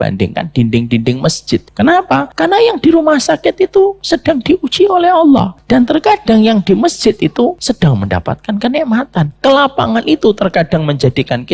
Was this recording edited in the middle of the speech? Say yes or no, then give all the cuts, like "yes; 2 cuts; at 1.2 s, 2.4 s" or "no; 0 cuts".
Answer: yes; 4 cuts; at 1.7 s, 2.3 s, 5.6 s, 7.6 s